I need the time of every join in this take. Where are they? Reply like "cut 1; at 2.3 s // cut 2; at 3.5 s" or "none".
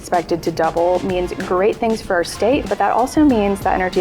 cut 1; at 2.7 s